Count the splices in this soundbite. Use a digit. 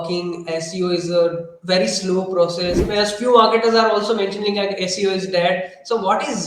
1